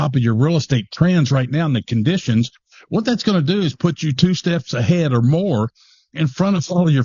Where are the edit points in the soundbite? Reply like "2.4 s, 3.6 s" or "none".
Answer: none